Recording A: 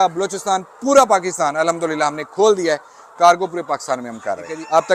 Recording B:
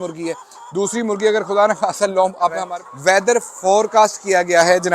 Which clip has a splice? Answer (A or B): B